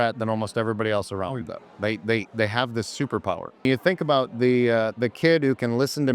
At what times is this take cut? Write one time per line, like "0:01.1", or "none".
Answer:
0:03.6

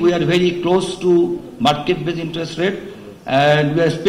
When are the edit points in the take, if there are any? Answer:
none

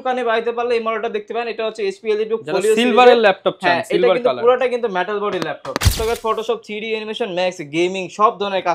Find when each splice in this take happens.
0:06.0

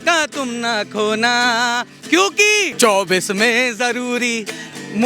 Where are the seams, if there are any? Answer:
0:02.7

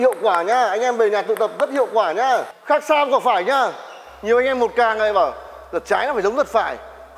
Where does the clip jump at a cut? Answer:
0:02.5

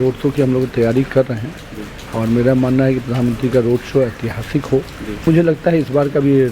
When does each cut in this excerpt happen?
0:05.3

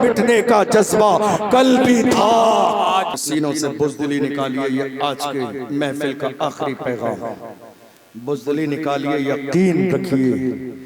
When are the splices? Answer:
0:03.2

